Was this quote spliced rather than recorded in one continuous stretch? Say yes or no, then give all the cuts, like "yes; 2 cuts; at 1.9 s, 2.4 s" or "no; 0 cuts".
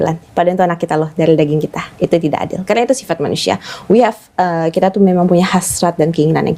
yes; 1 cut; at 1.8 s